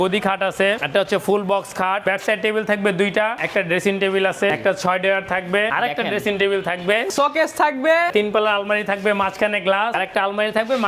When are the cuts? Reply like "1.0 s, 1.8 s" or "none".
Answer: 0.8 s, 2.0 s, 3.4 s, 4.5 s, 5.7 s, 7.1 s, 8.1 s, 10.0 s